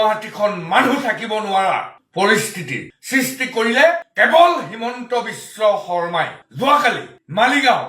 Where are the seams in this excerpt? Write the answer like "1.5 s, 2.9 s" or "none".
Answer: 6.4 s